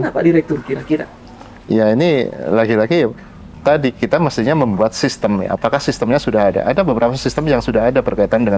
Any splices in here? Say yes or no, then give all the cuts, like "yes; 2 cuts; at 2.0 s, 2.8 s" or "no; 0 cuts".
no; 0 cuts